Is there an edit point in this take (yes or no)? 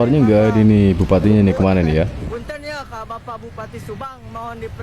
no